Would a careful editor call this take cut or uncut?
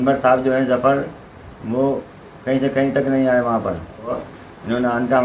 cut